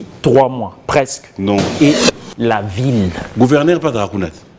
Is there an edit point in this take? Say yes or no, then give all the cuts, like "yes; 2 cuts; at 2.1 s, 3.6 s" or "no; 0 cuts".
yes; 1 cut; at 2.0 s